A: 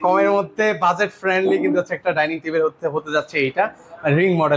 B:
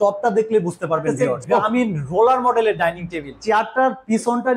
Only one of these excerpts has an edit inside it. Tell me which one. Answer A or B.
B